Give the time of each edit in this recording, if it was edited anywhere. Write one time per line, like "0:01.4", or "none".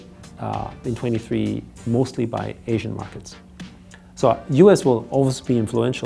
none